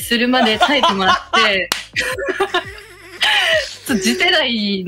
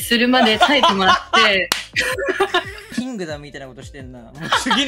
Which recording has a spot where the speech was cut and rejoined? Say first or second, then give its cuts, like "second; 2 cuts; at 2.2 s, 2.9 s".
second; 1 cut; at 2.9 s